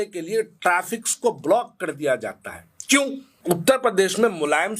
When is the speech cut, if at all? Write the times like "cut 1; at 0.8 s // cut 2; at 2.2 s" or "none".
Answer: cut 1; at 3.3 s